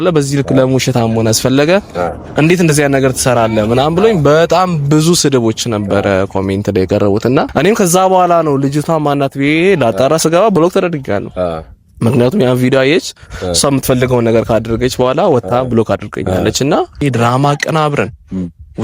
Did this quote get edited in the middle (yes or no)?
yes